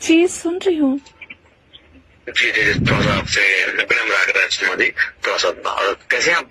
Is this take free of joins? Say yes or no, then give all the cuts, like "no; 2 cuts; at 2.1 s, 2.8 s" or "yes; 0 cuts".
yes; 0 cuts